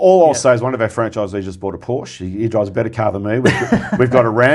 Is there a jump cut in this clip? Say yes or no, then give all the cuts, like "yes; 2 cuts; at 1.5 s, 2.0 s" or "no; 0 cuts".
no; 0 cuts